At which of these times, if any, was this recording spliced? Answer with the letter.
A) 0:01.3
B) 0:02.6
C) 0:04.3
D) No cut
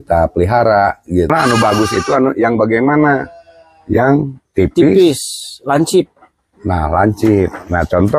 A